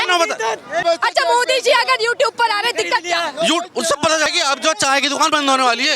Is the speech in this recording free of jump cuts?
no; 2 cuts; at 0.8 s, 4.3 s

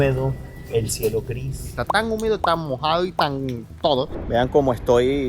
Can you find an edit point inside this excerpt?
yes; 2 cuts; at 1.7 s, 4.2 s

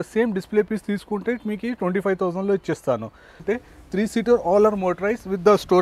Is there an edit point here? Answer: yes; 1 cut; at 3.4 s

